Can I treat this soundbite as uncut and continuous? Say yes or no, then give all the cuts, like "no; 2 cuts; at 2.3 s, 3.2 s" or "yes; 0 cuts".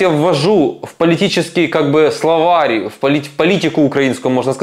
yes; 0 cuts